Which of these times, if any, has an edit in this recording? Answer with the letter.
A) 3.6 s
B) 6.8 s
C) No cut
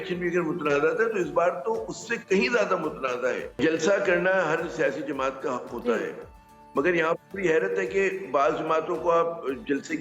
A